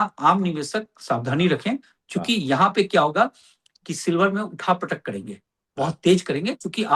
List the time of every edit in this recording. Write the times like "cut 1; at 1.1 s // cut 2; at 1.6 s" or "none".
none